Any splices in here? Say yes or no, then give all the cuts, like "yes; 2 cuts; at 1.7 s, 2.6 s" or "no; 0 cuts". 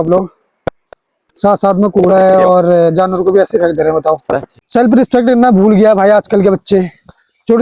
yes; 1 cut; at 4.5 s